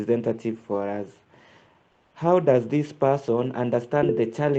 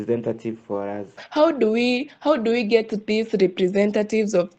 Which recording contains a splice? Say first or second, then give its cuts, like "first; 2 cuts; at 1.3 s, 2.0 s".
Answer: second; 1 cut; at 1.2 s